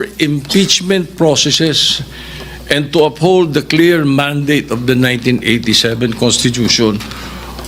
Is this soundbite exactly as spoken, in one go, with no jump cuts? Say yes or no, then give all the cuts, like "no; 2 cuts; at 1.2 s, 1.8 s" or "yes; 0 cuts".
yes; 0 cuts